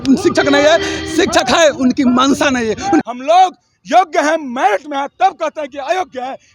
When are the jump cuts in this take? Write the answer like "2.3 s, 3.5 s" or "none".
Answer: 3.0 s

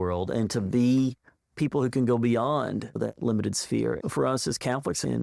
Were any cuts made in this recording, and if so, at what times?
4.0 s

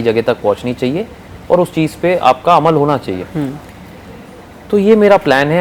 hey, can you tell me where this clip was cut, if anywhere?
none

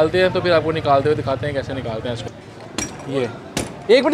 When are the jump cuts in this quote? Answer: 2.2 s

